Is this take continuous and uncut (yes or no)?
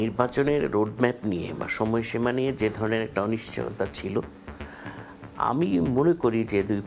yes